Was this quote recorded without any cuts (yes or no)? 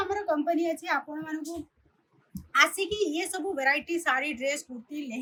yes